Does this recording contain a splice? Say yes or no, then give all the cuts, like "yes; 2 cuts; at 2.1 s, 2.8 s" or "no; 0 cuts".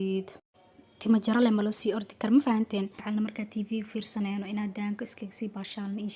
yes; 1 cut; at 3.0 s